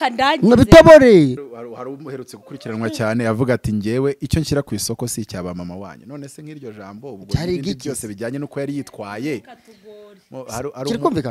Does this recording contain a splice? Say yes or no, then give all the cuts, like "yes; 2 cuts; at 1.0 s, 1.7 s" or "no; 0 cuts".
yes; 1 cut; at 1.4 s